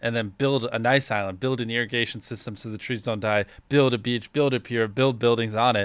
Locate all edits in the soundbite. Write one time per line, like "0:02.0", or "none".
none